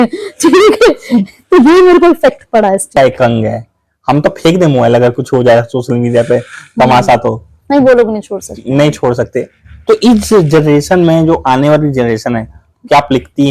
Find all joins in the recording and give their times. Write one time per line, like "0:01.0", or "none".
0:02.9